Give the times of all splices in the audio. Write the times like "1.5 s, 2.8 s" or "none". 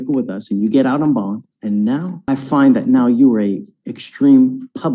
2.1 s, 3.4 s